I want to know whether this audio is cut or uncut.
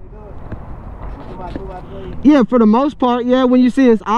uncut